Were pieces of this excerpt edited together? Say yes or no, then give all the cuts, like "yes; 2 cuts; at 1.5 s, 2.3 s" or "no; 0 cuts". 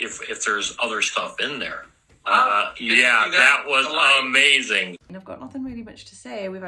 yes; 1 cut; at 5.1 s